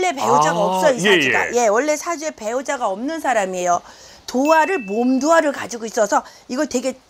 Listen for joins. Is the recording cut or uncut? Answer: uncut